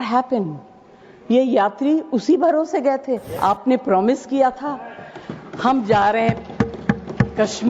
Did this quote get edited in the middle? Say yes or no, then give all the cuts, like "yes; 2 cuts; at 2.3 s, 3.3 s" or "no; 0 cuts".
yes; 1 cut; at 3.3 s